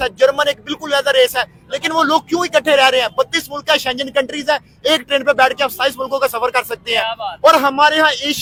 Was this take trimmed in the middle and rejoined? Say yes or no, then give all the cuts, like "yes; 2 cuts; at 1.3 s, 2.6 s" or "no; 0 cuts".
no; 0 cuts